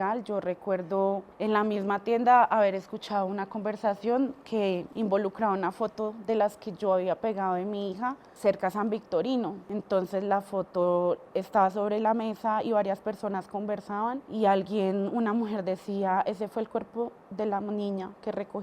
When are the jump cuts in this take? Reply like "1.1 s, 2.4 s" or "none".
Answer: 1.3 s, 4.9 s, 8.3 s, 9.7 s, 14.2 s